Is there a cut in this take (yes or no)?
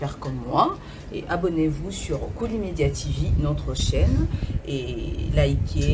no